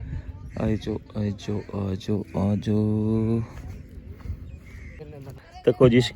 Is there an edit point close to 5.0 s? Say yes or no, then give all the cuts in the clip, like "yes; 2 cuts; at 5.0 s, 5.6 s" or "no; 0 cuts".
yes; 1 cut; at 5.0 s